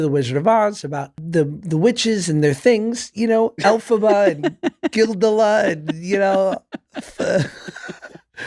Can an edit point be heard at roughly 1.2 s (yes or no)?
yes